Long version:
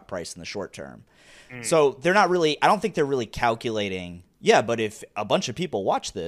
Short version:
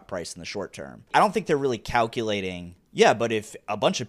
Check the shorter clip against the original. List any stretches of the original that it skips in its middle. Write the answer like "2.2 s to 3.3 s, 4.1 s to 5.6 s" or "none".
1.1 s to 2.6 s